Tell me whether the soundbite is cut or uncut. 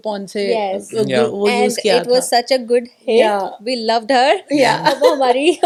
uncut